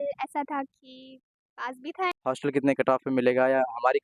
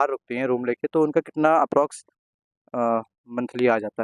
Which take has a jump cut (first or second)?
first